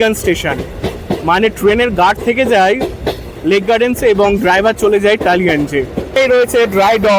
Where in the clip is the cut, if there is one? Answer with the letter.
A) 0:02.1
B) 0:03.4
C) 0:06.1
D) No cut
C